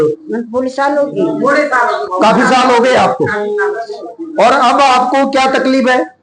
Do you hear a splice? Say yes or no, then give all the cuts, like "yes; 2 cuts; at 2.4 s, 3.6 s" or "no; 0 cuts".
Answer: no; 0 cuts